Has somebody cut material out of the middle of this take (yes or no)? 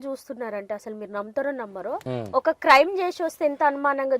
yes